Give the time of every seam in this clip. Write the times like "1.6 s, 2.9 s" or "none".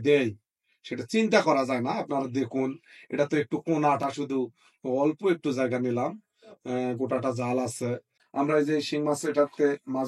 8.2 s

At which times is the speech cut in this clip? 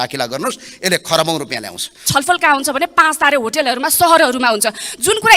2.1 s

